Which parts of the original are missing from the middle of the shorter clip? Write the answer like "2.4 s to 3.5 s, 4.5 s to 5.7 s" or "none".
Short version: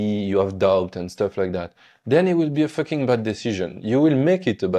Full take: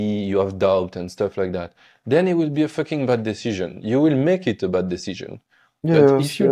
none